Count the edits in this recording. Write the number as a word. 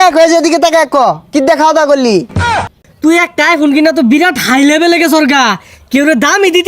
one